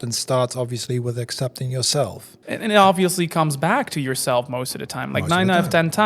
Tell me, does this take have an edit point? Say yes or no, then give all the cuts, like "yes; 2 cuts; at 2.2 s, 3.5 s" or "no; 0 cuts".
yes; 1 cut; at 2.3 s